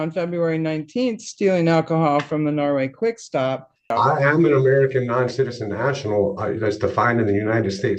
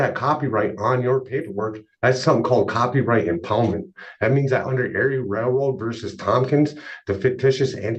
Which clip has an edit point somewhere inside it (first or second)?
first